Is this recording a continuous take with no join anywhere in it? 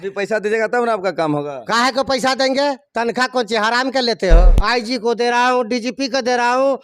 no; 1 cut; at 4.5 s

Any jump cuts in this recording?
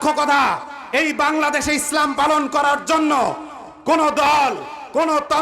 no; 0 cuts

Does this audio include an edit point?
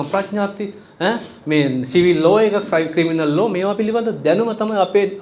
no; 0 cuts

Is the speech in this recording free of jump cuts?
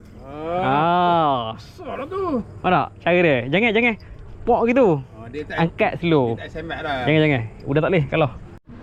yes; 0 cuts

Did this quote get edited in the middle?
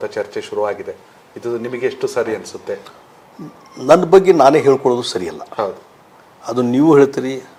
no; 0 cuts

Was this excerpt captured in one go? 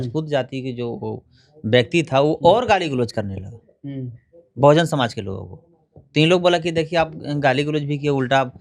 yes; 0 cuts

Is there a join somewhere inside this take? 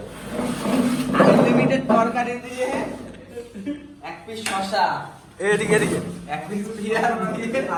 no; 0 cuts

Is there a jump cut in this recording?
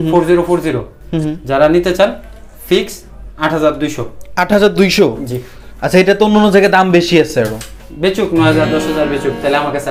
no; 0 cuts

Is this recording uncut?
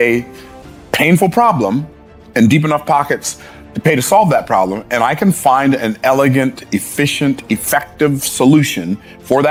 yes; 0 cuts

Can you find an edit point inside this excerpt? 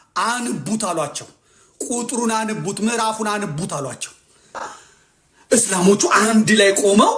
yes; 1 cut; at 4.7 s

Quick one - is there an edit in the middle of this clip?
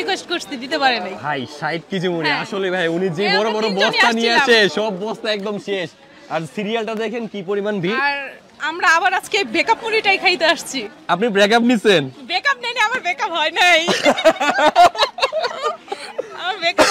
no; 0 cuts

